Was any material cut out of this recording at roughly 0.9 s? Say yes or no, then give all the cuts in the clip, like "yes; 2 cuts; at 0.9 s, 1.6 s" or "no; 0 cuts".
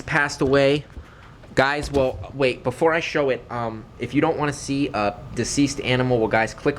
no; 0 cuts